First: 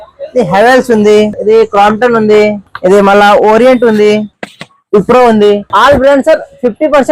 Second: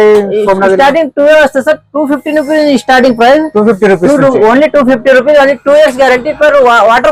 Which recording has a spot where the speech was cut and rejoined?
first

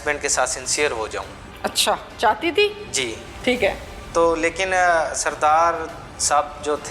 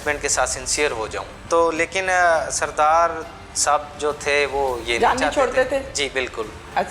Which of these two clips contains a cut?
second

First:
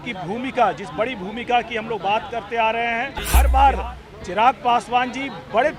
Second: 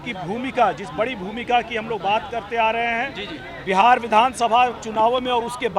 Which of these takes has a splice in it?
first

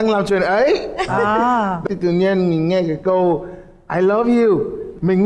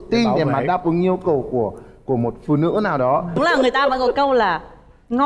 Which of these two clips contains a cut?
second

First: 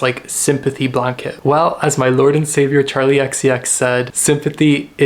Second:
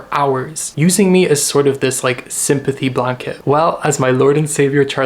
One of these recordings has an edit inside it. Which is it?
first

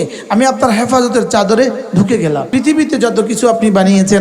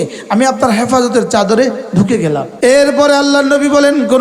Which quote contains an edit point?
first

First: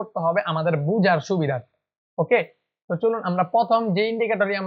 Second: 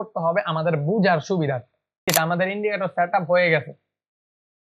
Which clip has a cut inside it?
second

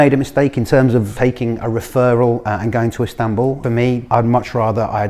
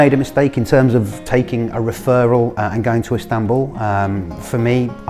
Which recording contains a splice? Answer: first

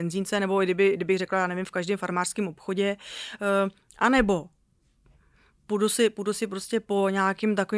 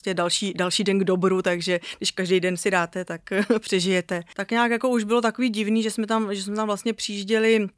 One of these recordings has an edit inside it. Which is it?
second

